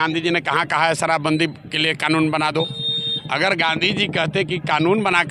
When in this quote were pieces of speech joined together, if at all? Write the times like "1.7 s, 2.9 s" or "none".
none